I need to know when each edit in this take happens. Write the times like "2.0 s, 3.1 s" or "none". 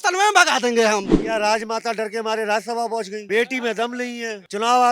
1.1 s, 3.2 s